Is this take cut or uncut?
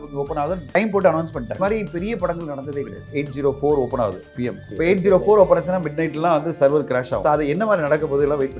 cut